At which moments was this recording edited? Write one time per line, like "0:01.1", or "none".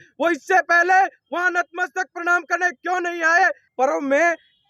0:03.7

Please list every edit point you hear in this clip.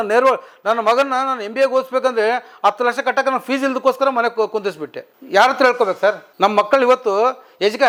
none

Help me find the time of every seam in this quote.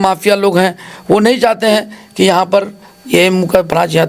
none

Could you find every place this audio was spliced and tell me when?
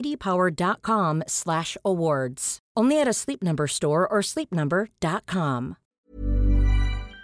0:05.9

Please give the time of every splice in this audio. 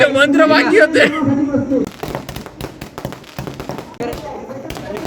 0:02.0
0:04.0

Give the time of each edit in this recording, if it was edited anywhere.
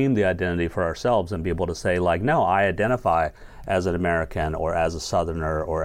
none

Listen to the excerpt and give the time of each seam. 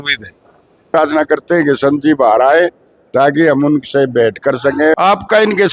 0:00.9
0:04.9

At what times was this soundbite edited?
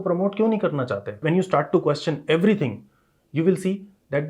0:01.2

